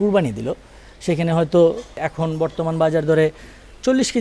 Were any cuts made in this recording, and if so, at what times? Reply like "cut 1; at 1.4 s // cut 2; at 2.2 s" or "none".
cut 1; at 2.0 s